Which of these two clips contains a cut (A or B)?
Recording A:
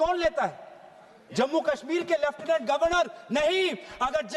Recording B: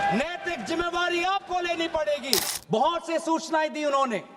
B